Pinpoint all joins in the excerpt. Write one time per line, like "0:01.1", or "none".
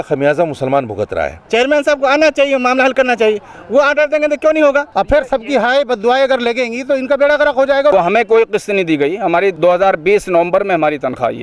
0:01.4
0:04.9
0:07.9
0:09.5